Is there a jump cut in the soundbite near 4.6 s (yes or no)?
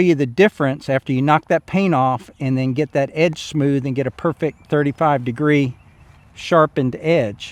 no